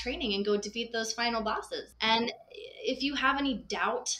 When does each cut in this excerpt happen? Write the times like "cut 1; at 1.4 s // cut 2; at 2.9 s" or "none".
cut 1; at 1.9 s